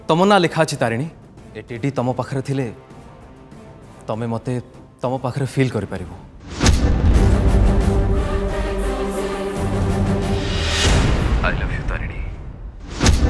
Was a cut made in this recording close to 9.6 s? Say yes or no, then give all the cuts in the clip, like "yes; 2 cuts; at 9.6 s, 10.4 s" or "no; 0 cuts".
yes; 1 cut; at 9.6 s